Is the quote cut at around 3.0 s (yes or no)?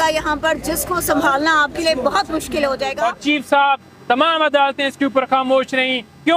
yes